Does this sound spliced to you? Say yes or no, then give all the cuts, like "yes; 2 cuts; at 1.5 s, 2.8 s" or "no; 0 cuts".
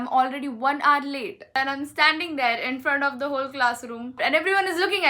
yes; 2 cuts; at 1.5 s, 4.2 s